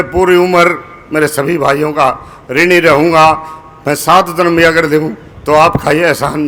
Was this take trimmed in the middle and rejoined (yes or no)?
no